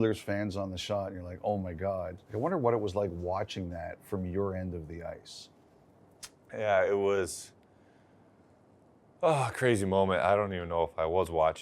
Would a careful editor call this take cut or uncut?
cut